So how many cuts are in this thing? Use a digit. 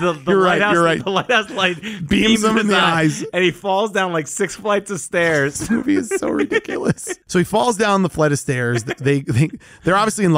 1